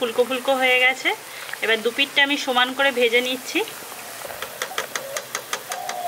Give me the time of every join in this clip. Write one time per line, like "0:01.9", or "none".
0:04.3